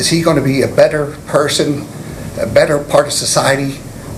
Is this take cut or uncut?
uncut